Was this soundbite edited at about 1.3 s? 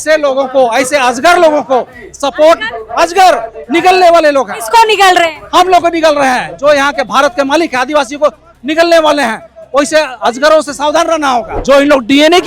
no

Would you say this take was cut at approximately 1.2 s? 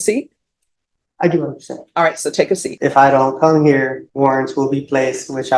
no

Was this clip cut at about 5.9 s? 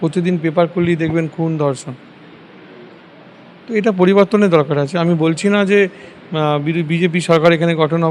no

